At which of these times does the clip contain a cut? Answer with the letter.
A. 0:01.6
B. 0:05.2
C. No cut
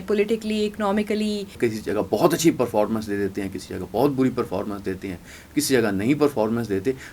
A